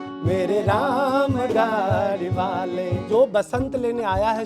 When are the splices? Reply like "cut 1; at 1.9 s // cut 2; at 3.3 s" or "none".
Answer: cut 1; at 3.0 s